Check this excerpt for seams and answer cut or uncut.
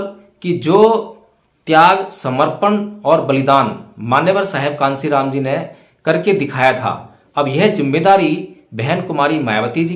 uncut